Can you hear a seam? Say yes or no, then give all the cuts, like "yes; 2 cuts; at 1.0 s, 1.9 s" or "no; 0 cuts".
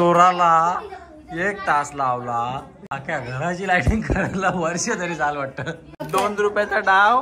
yes; 1 cut; at 6.1 s